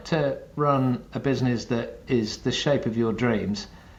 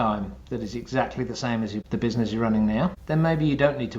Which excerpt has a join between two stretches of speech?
second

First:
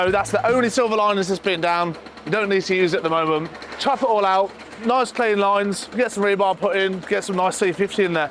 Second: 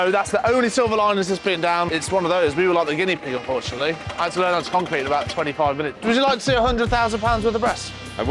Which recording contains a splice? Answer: second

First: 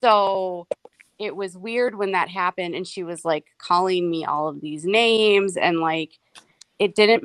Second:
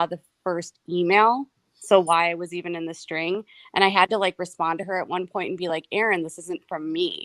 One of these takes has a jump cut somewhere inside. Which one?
first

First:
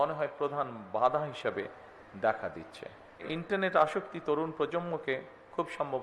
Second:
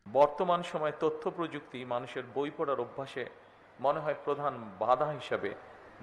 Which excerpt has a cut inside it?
first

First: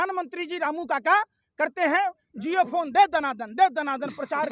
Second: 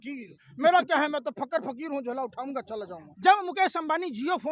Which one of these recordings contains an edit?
second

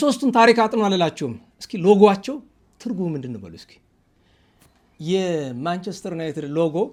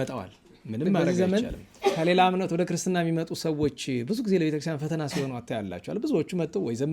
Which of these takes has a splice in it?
second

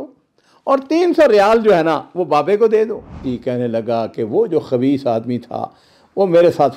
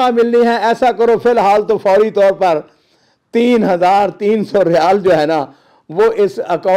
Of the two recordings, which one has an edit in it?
first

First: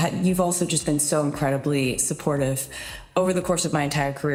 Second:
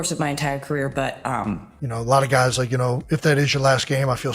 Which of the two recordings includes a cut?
second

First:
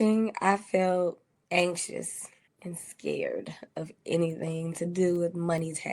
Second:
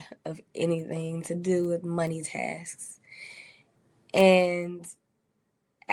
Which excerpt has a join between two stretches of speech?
first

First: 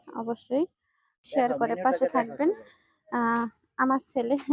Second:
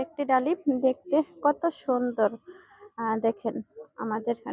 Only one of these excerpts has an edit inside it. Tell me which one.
first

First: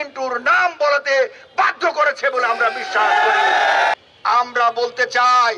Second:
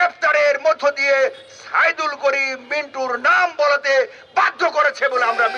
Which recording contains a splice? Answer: first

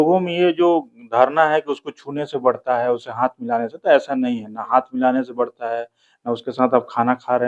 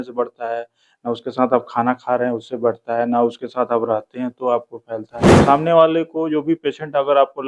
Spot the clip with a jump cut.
second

